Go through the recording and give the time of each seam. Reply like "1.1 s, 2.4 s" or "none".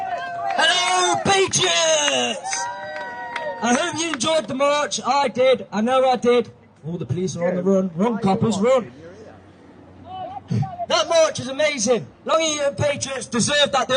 none